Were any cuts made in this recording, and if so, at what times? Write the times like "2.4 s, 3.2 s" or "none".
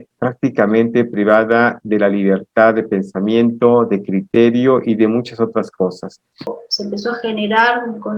6.6 s